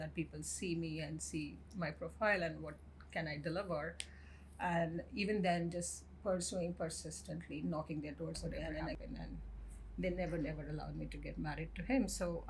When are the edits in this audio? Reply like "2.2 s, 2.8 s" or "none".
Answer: 9.0 s